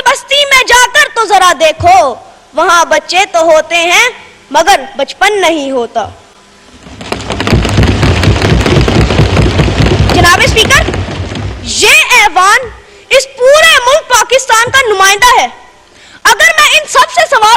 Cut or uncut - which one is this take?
uncut